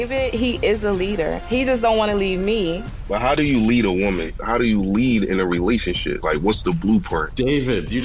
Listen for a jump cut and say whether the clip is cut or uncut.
uncut